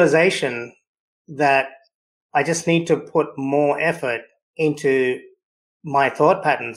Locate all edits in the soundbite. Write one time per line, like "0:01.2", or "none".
none